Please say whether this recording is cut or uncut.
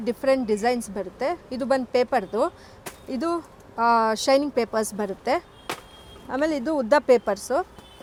uncut